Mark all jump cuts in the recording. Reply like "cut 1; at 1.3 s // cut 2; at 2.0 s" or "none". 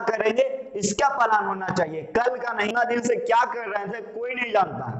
cut 1; at 2.7 s